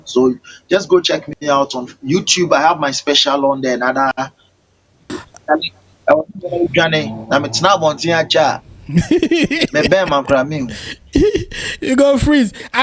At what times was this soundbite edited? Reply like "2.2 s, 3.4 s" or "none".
5.1 s